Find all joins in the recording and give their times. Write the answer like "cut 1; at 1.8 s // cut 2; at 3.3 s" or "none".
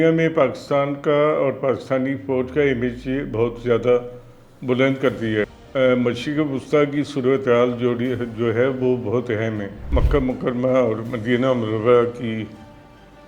cut 1; at 5.6 s // cut 2; at 9.8 s